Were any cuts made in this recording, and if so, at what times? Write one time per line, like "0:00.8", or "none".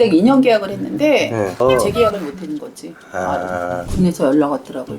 0:03.8